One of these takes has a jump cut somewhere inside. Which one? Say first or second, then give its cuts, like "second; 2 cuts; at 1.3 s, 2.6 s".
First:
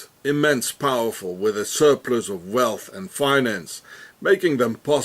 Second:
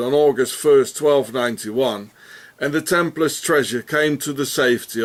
first; 1 cut; at 4.1 s